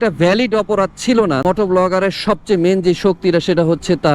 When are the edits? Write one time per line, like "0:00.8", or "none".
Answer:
0:01.4